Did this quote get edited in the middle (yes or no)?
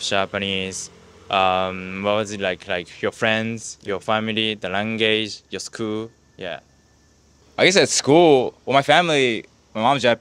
no